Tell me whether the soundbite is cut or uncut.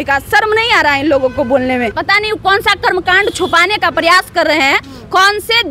cut